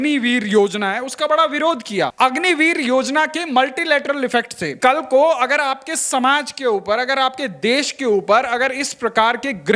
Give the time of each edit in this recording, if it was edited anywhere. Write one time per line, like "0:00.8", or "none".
0:02.1
0:04.8